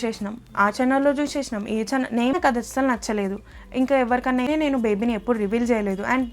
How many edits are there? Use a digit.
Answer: 2